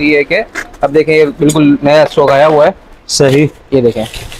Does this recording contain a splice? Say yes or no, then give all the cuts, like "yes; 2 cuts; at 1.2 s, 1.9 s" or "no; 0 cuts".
no; 0 cuts